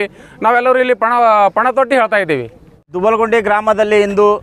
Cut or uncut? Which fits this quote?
uncut